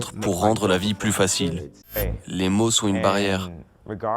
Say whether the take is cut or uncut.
cut